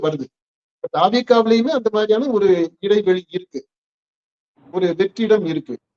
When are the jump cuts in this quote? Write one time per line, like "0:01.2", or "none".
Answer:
none